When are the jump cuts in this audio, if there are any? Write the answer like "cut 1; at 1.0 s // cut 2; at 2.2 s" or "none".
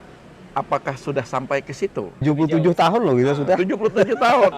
cut 1; at 2.2 s